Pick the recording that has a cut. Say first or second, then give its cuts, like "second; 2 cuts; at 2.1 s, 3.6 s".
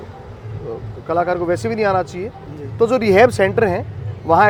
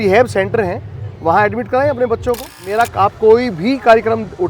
second; 1 cut; at 2.6 s